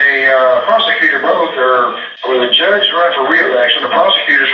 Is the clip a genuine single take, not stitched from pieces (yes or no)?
no